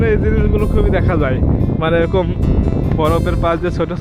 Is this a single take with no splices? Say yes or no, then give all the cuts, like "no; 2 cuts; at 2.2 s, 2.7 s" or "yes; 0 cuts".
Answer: yes; 0 cuts